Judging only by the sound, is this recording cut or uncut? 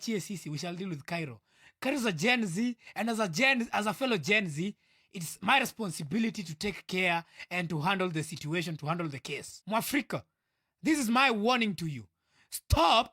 cut